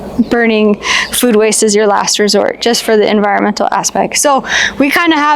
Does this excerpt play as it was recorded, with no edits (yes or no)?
yes